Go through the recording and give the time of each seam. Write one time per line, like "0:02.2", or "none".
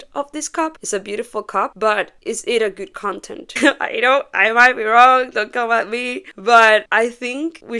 0:03.4

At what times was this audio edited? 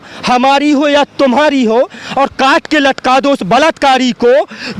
none

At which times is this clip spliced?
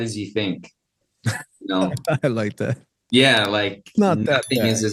none

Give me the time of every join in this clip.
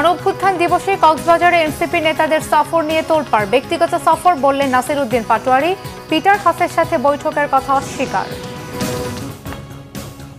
0:09.2

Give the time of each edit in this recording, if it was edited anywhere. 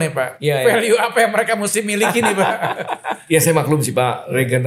0:03.1

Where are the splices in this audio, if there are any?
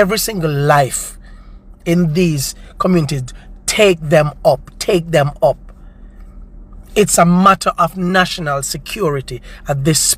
none

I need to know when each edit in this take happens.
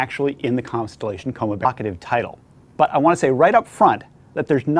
none

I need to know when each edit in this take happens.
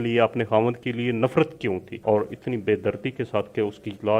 0:01.9

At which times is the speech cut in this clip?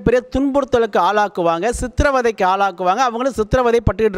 none

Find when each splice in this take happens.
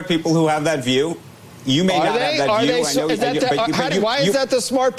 0:02.0

